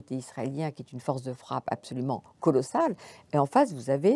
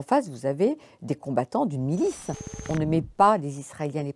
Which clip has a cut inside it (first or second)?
second